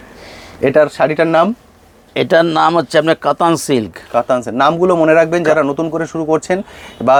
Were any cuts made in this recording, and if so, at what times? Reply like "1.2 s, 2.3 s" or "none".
none

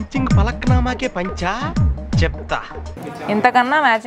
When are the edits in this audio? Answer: 2.8 s

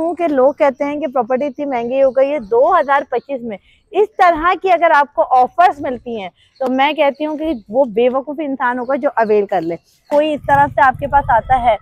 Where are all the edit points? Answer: 10.0 s

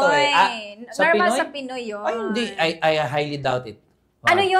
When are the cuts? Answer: none

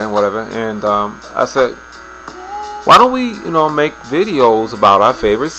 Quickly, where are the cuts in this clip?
2.4 s

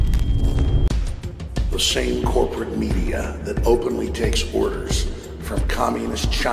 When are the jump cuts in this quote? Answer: none

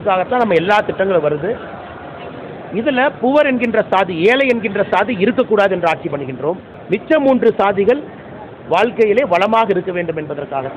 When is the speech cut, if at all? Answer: 6.7 s

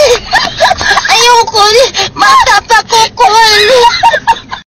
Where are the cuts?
none

